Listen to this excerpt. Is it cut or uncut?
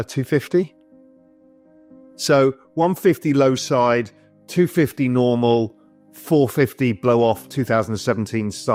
uncut